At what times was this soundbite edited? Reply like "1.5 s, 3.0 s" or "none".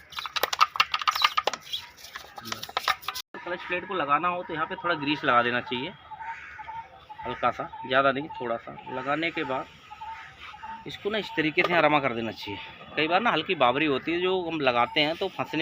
3.4 s